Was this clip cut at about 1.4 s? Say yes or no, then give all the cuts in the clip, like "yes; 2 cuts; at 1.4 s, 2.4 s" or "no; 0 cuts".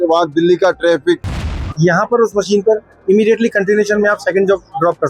yes; 1 cut; at 1.4 s